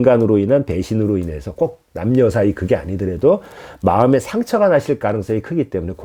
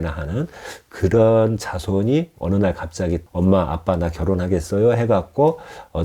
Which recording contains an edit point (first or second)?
second